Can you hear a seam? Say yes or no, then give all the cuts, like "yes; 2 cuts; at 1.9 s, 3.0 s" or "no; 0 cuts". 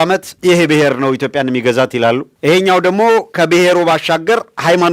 no; 0 cuts